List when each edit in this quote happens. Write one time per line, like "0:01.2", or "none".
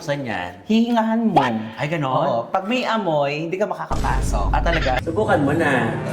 0:05.0